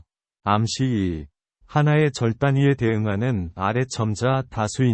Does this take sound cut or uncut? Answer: uncut